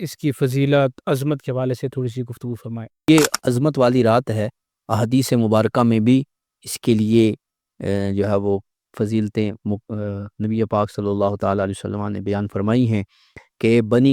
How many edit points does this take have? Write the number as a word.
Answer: one